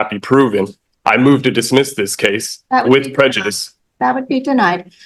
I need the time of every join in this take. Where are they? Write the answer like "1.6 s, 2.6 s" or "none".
none